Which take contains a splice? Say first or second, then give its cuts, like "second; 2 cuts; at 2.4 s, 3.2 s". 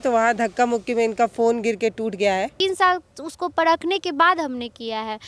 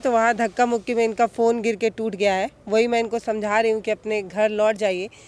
first; 1 cut; at 2.5 s